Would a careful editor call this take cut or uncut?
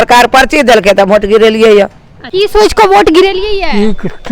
cut